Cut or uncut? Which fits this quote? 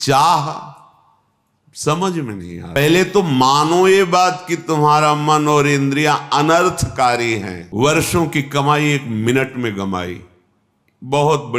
cut